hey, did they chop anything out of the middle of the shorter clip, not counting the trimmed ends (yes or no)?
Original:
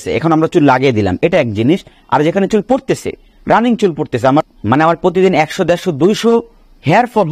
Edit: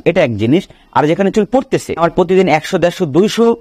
yes